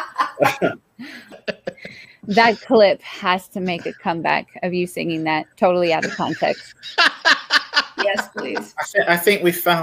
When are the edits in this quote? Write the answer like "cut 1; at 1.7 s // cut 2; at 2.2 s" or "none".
cut 1; at 1.4 s